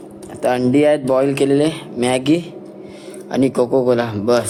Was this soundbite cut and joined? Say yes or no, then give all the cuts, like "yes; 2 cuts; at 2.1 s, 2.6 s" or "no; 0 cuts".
no; 0 cuts